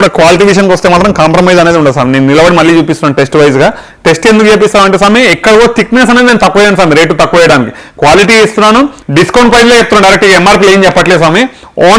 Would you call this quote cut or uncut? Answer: cut